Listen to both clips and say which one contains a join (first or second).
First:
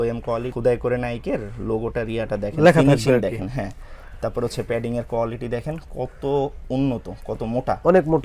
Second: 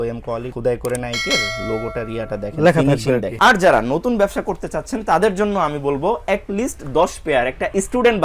second